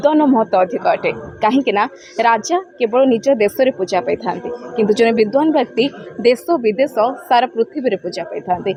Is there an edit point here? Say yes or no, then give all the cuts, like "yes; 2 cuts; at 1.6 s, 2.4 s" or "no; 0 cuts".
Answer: no; 0 cuts